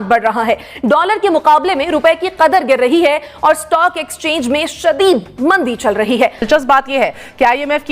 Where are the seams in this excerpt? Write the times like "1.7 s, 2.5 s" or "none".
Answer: 6.5 s